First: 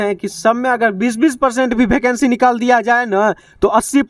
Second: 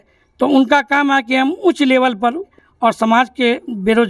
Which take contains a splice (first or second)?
second